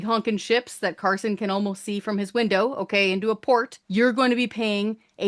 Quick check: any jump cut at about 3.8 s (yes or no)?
yes